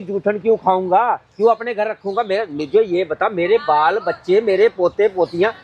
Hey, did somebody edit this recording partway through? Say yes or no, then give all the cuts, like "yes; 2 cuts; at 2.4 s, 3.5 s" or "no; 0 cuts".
no; 0 cuts